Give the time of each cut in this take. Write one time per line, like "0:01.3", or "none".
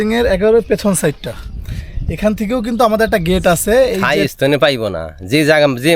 0:04.0